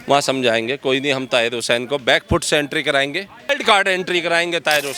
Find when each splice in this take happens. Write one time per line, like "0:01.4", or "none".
0:03.5